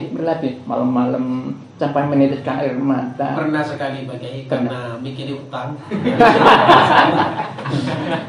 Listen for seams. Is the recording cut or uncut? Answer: uncut